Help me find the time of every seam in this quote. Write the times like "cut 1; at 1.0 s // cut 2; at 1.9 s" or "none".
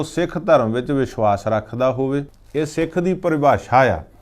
cut 1; at 2.4 s